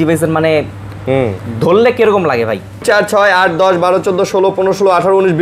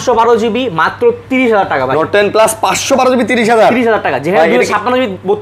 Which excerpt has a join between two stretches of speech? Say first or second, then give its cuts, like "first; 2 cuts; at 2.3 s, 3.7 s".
first; 1 cut; at 2.8 s